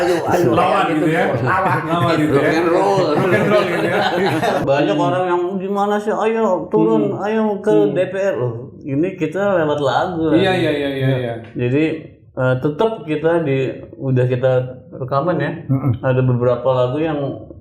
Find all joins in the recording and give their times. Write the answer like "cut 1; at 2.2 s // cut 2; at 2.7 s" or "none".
cut 1; at 4.6 s